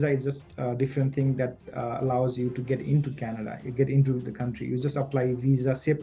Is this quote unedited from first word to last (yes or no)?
yes